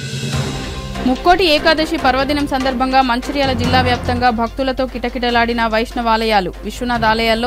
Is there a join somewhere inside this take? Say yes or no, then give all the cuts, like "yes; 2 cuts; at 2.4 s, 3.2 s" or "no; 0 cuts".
yes; 1 cut; at 1.0 s